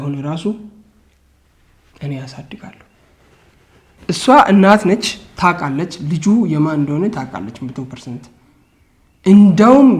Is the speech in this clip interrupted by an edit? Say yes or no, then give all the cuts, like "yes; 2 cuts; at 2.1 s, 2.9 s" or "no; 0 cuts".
yes; 1 cut; at 3.9 s